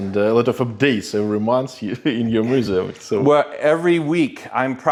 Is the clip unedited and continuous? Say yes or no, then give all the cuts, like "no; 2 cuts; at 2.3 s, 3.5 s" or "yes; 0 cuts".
yes; 0 cuts